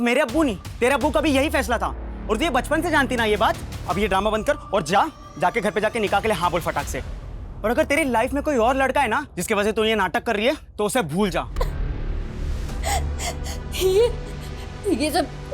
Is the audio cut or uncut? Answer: cut